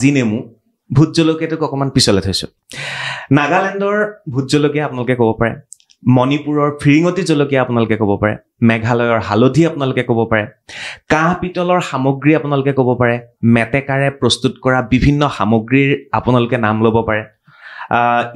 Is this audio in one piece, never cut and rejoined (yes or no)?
yes